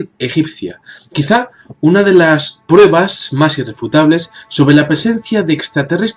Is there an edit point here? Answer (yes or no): no